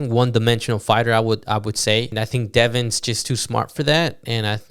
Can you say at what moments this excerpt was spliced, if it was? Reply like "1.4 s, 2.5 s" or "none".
2.1 s

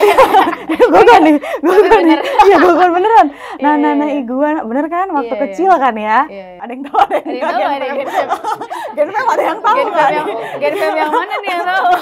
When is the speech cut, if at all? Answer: none

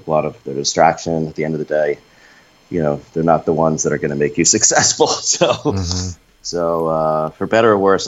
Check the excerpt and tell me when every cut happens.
none

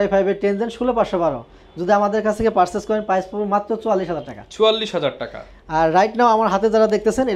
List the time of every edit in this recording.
none

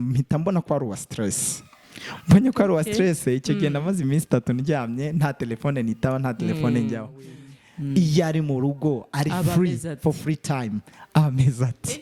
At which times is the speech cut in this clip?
7.3 s

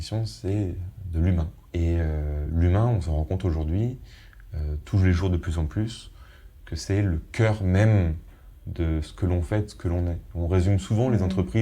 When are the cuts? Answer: 1.6 s, 2.4 s

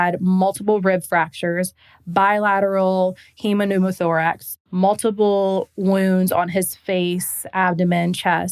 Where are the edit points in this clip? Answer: 4.4 s

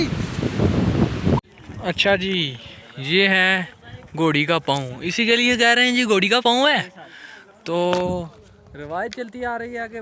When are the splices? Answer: 1.5 s

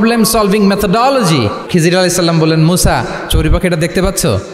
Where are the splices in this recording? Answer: 1.6 s

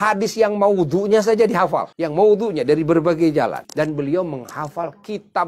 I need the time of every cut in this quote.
2.0 s, 3.6 s

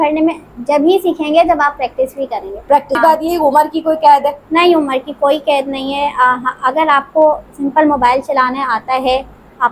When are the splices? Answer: 3.0 s

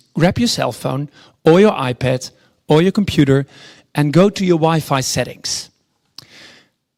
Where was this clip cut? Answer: none

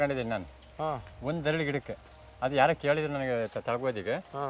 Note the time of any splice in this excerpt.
none

